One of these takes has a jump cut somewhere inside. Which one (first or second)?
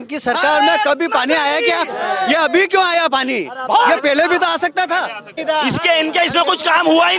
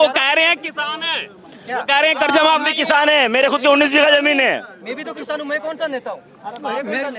first